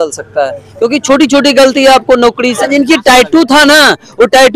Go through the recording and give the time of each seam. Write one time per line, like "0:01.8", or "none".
0:02.6